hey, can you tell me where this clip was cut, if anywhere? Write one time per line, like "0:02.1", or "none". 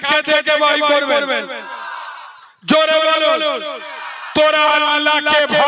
none